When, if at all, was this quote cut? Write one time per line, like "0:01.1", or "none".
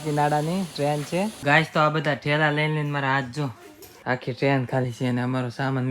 0:01.4
0:04.2